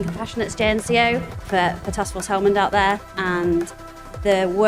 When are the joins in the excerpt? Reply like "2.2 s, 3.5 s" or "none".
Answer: 1.4 s, 3.1 s